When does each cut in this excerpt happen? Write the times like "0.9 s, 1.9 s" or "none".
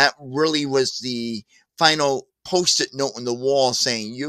2.3 s